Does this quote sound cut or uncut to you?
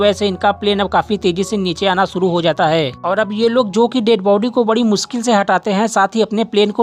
uncut